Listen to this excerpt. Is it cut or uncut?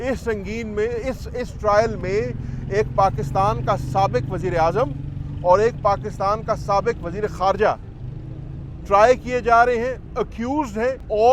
uncut